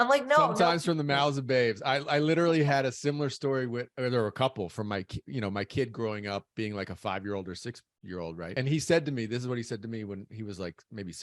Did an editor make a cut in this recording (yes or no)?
yes